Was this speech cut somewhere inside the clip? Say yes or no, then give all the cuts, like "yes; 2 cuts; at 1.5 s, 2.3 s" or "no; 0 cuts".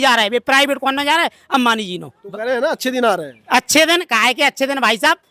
no; 0 cuts